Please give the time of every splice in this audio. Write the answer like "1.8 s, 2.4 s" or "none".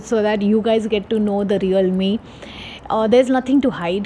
none